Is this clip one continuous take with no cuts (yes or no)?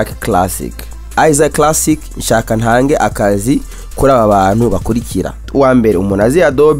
no